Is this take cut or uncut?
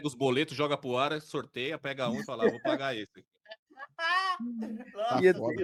uncut